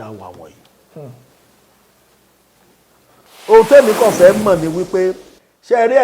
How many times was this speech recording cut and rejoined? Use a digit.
1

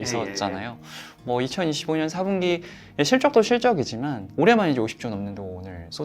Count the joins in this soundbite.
1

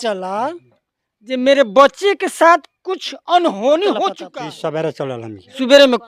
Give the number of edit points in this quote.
1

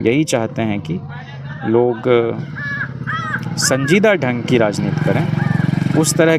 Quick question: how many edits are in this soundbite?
0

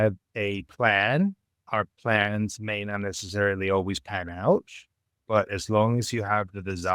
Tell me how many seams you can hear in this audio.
2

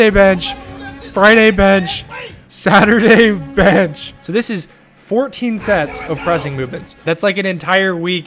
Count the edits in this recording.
2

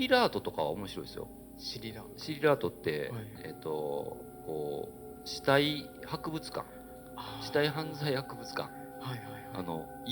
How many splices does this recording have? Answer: 0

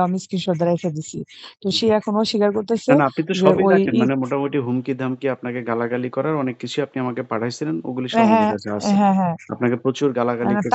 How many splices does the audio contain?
0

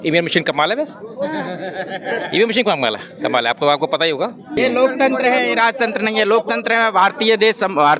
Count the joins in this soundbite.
1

